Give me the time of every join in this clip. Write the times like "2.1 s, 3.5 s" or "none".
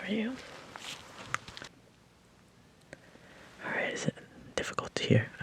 1.7 s

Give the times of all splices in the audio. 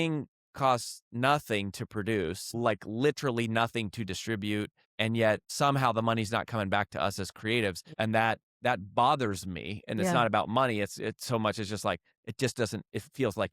2.5 s, 4.8 s, 5.5 s, 7.8 s, 8.5 s

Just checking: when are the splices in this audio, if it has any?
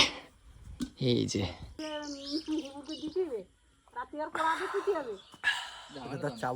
1.7 s

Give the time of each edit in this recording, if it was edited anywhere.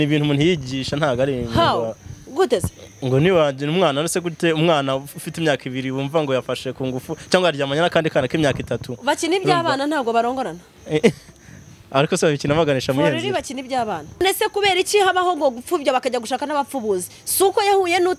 14.2 s

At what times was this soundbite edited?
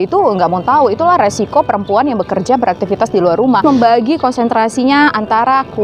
3.6 s

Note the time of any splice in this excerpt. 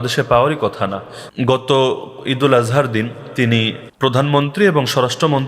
1.2 s, 3.8 s

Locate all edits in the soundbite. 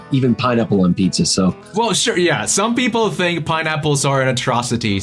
1.6 s

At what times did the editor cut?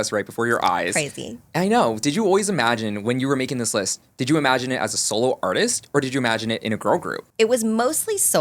7.2 s

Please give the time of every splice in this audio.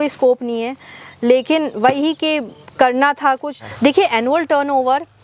3.6 s

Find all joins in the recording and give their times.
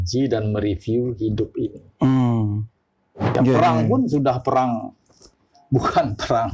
3.2 s

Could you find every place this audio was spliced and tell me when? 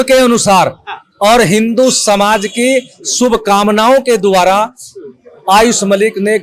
none

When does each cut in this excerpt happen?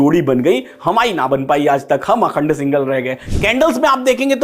3.1 s

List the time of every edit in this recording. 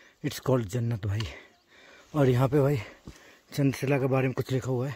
none

